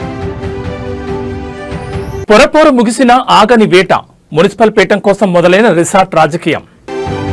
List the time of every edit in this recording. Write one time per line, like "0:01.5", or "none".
0:01.7